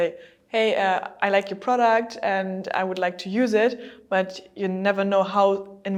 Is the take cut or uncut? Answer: uncut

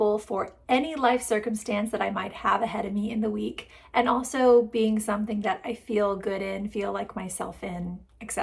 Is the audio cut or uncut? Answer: uncut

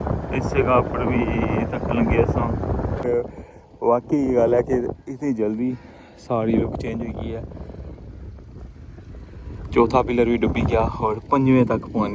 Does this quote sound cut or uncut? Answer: cut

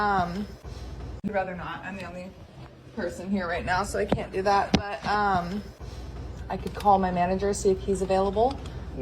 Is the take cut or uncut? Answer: cut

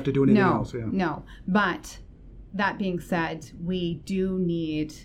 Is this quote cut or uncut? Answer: uncut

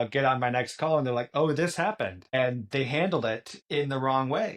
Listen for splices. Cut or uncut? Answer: uncut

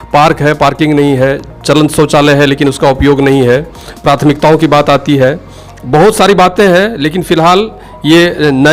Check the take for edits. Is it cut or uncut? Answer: uncut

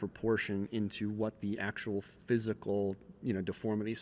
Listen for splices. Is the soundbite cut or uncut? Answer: uncut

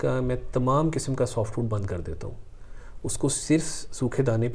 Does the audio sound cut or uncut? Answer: uncut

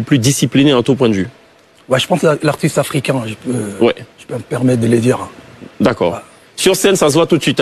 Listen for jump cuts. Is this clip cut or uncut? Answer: uncut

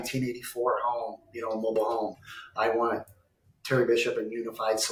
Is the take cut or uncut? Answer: uncut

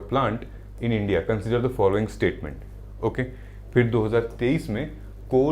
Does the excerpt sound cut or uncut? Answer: uncut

